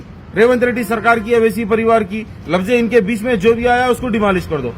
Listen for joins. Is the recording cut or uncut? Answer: uncut